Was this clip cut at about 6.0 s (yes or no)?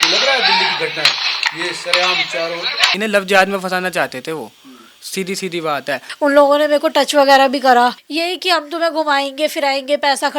yes